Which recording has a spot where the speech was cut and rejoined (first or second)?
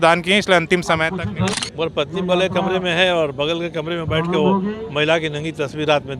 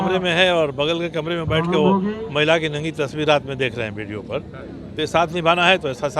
first